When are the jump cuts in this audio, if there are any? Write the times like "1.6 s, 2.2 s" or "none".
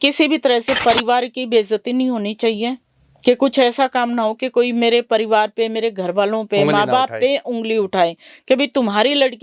none